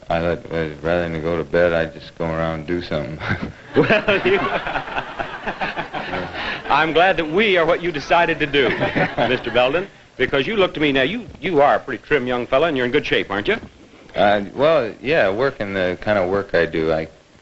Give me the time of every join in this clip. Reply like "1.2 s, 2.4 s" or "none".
11.2 s